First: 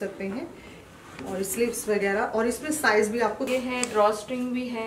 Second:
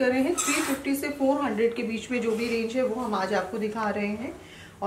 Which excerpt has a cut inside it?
first; 1 cut; at 3.5 s

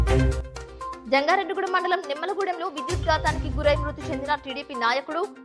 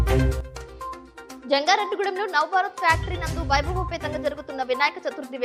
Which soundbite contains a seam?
first; 1 cut; at 1.0 s

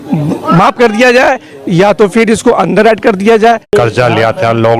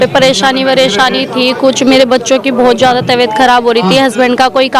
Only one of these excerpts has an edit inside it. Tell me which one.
first; 1 cut; at 3.7 s

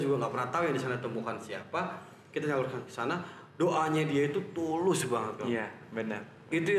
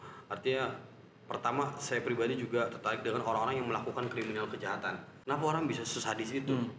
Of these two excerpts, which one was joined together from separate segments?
second; 1 cut; at 5.1 s

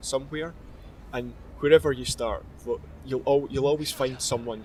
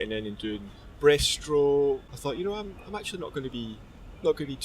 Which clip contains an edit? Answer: second; 1 cut; at 2.1 s

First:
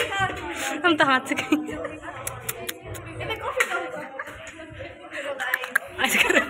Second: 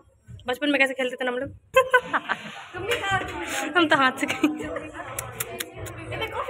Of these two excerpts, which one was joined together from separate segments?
second; 1 cut; at 1.7 s

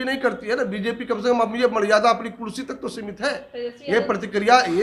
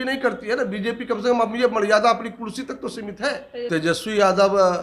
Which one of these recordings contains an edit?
second; 1 cut; at 3.7 s

